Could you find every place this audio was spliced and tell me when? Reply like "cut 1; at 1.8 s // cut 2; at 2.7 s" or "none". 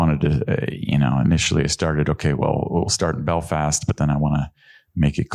none